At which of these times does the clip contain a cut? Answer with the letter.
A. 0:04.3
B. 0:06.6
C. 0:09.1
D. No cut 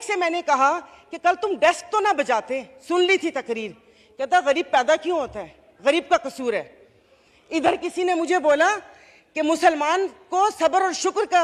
D